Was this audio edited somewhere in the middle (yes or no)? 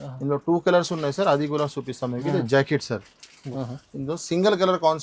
yes